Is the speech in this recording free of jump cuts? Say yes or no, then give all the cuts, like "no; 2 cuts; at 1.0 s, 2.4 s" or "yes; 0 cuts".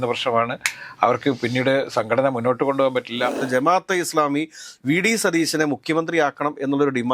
no; 1 cut; at 3.4 s